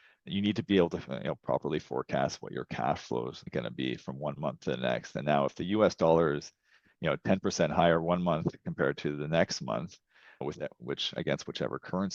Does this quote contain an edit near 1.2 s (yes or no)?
no